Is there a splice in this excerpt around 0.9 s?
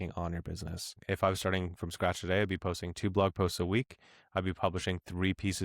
yes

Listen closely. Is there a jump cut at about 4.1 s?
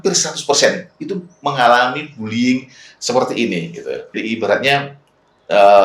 yes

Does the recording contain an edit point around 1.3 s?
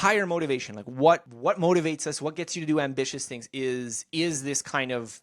yes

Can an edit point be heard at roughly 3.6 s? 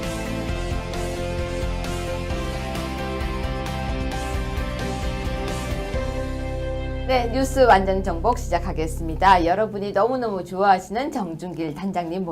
yes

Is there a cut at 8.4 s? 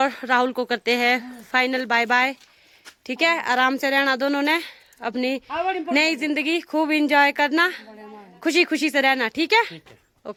no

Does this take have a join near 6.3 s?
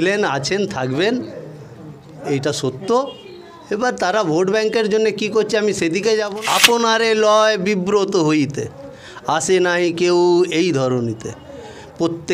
yes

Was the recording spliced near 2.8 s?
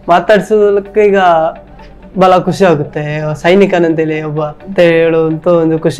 no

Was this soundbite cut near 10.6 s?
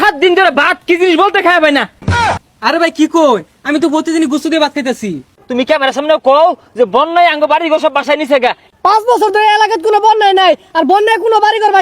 no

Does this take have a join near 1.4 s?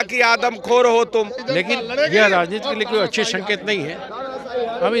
yes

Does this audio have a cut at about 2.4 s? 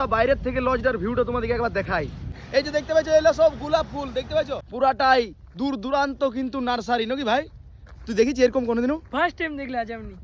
yes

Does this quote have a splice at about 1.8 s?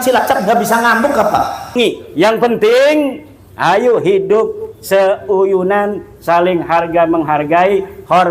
yes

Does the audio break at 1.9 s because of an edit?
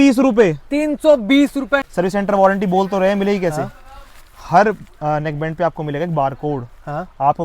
yes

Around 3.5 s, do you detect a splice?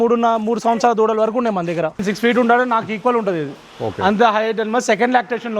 no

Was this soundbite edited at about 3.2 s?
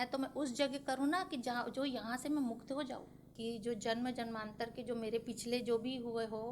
yes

